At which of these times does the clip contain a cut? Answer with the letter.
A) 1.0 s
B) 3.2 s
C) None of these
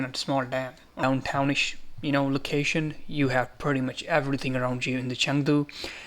A